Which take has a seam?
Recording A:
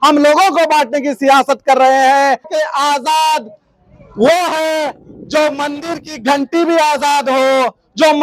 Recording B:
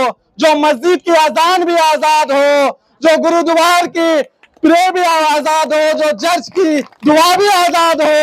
A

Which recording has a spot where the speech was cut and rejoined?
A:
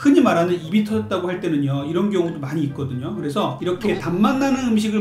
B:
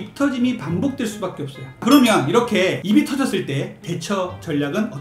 B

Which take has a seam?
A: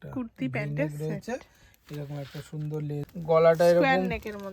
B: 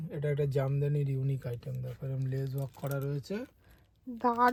A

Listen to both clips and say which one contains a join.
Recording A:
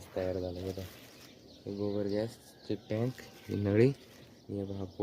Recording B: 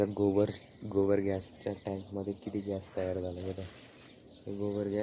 A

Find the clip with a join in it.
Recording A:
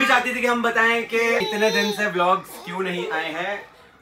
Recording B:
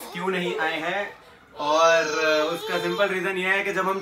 A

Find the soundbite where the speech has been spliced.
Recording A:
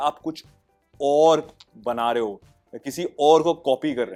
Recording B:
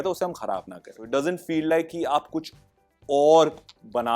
B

